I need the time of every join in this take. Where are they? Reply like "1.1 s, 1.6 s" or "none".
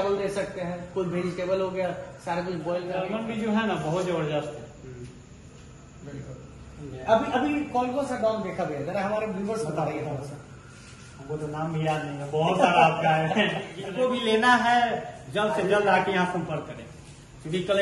3.0 s, 13.8 s